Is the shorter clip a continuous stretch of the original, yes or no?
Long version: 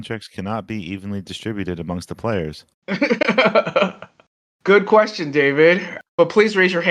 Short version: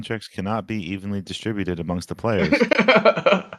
no